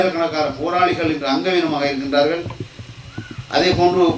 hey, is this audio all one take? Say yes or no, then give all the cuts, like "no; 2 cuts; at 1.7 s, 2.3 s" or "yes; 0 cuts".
yes; 0 cuts